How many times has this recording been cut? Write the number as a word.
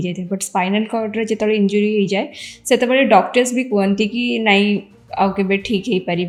zero